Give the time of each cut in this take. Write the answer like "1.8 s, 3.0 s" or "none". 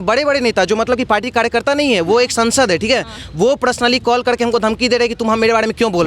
none